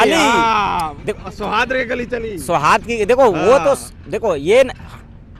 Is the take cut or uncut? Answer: uncut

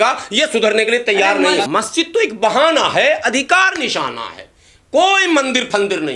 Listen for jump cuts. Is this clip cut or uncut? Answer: cut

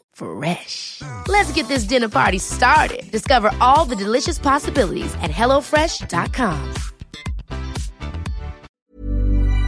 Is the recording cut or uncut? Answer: cut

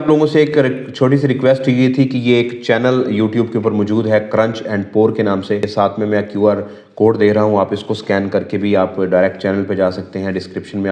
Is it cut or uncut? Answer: uncut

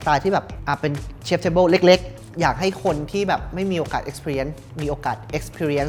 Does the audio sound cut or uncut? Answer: uncut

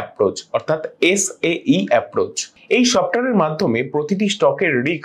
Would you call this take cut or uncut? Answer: cut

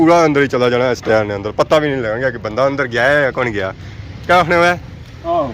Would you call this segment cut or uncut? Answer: uncut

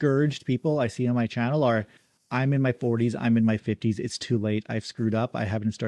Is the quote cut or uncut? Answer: uncut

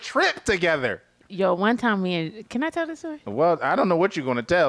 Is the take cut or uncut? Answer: uncut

